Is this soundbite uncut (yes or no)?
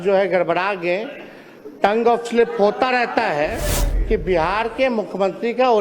no